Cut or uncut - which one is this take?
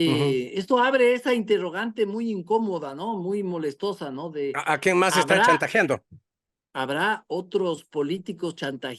uncut